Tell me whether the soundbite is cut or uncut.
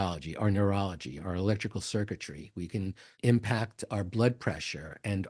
cut